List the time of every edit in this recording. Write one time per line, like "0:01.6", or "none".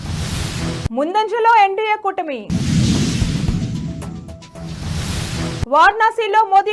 0:00.9
0:02.4
0:05.7